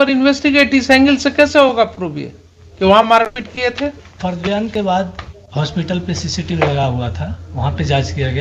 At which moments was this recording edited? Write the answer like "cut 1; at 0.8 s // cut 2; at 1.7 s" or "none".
none